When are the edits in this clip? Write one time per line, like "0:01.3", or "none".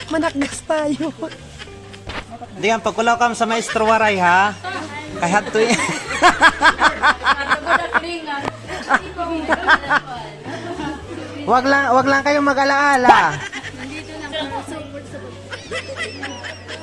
0:02.5